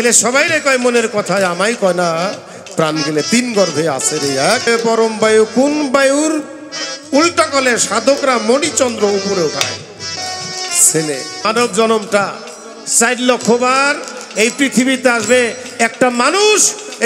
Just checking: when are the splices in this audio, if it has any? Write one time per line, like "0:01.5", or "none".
0:04.7
0:10.2
0:11.5

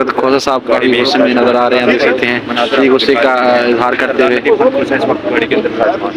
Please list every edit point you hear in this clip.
none

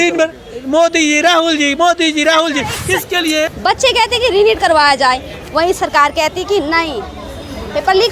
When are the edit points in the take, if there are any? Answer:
0:03.5

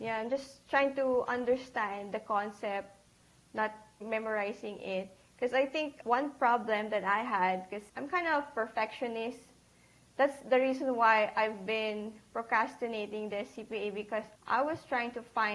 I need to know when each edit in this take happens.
0:04.0
0:06.0
0:07.8
0:14.3

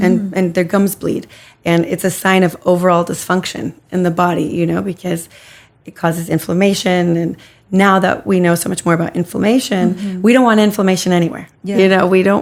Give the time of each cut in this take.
none

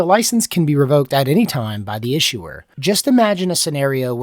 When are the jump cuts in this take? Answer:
0:02.6

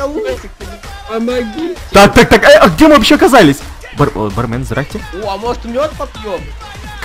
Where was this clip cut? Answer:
0:05.0

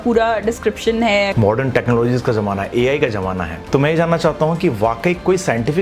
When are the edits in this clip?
0:01.3
0:03.5

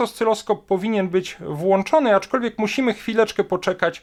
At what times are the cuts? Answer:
none

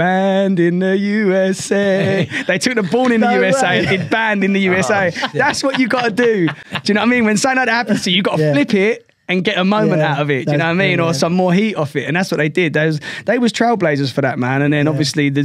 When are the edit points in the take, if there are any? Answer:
none

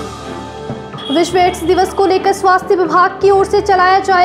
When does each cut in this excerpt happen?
0:00.9

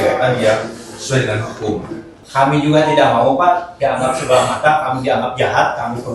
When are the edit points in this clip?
0:02.2

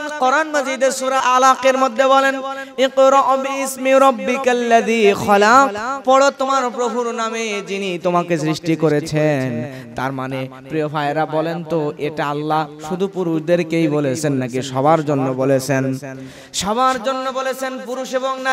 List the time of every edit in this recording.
0:01.2

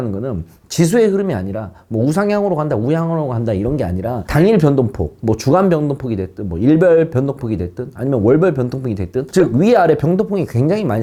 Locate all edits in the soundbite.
none

